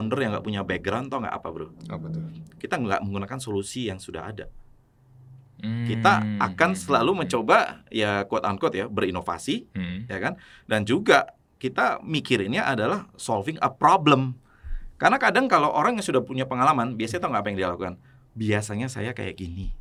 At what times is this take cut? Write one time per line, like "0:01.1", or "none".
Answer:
none

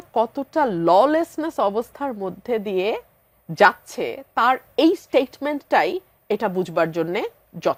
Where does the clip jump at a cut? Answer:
none

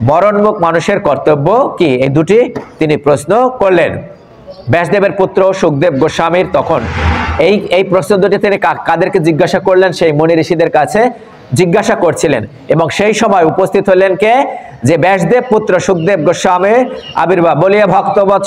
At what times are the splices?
none

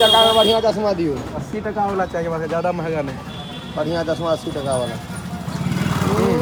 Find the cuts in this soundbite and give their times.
none

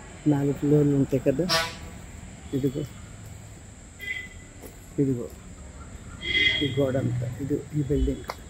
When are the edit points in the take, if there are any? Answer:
none

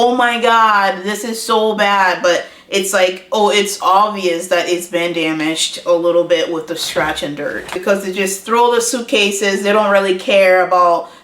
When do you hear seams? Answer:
0:07.8

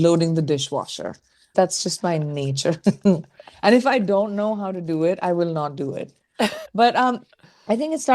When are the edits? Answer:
0:01.5
0:06.6

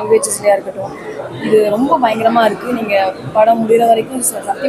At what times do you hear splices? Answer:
none

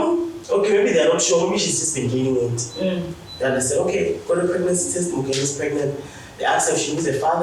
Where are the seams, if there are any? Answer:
none

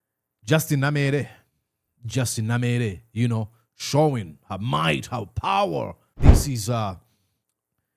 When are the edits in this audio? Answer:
0:06.0

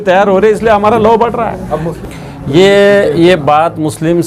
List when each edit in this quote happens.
0:02.0

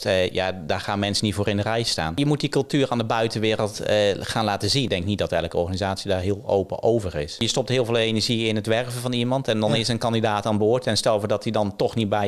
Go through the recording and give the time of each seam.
0:02.2
0:04.9
0:07.4

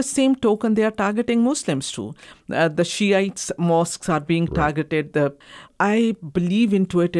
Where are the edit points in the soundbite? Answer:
0:05.6

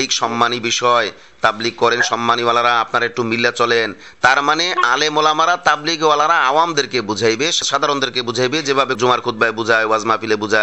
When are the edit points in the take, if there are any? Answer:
0:07.6
0:09.0

